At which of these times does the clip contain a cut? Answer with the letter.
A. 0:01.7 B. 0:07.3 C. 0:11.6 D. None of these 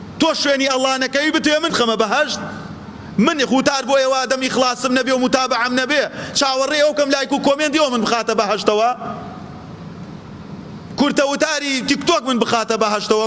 A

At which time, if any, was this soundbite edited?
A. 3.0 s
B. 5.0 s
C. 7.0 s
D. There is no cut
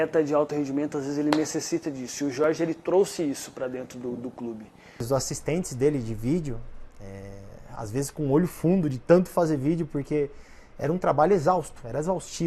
B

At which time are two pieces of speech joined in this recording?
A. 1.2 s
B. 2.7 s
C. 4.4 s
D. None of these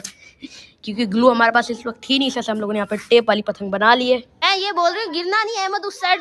C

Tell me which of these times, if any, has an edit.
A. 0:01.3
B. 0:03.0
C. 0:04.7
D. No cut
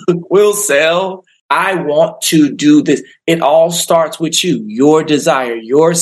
A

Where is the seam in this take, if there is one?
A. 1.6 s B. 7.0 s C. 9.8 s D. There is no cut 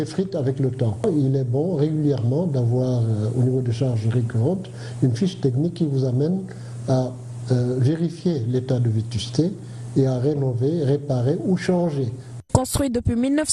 A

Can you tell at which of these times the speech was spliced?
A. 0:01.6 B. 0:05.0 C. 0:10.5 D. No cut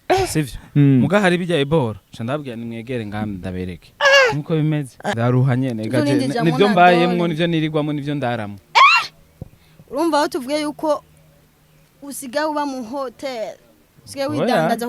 B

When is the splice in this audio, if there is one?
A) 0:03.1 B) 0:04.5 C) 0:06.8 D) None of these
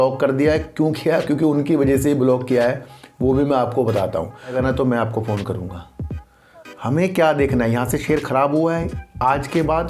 B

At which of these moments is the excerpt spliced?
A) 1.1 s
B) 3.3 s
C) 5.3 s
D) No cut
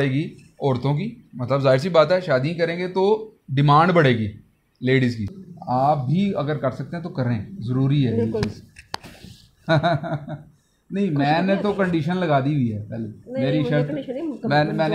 C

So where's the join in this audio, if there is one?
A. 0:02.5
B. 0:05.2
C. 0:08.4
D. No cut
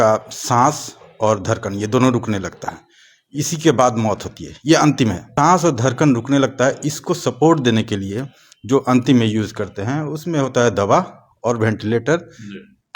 B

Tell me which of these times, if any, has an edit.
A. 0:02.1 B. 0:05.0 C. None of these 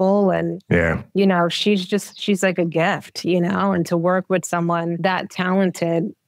B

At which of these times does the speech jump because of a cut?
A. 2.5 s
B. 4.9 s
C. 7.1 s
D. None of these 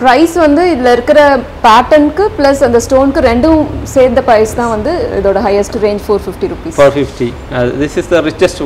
D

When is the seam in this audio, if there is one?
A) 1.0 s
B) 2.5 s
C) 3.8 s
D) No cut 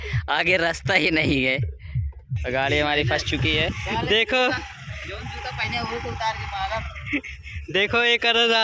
C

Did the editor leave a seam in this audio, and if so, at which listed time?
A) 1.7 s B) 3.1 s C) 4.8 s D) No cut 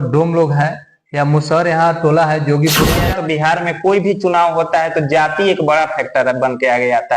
B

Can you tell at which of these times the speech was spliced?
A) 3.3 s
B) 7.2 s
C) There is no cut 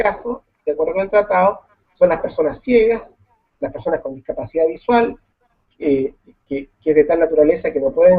A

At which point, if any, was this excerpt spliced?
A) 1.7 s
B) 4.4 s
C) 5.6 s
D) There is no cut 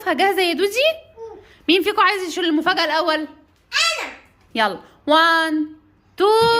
B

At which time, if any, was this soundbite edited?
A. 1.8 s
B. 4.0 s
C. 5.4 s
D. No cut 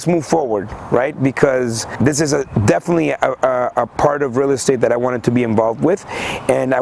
A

